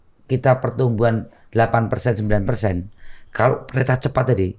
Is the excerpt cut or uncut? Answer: uncut